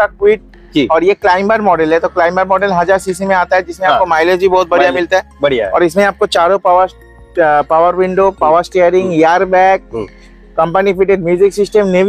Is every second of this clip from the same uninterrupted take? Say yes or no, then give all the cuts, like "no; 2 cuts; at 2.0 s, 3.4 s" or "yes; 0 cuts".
yes; 0 cuts